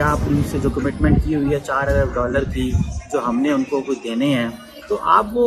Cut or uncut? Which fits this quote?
uncut